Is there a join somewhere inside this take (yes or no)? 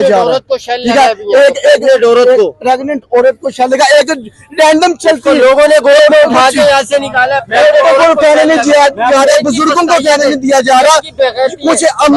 no